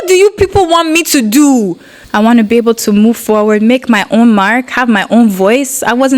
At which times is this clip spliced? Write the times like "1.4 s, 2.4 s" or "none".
2.0 s